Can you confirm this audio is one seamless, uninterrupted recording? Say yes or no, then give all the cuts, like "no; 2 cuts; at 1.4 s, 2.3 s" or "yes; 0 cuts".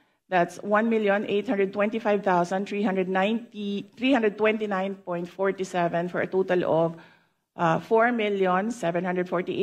yes; 0 cuts